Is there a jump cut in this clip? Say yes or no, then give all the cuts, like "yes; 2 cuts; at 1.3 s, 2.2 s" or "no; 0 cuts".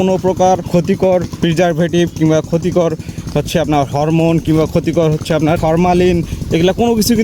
yes; 2 cuts; at 0.9 s, 5.6 s